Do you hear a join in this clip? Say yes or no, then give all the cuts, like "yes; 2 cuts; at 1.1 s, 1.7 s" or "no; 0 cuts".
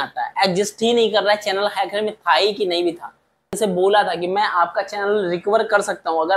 yes; 1 cut; at 3.5 s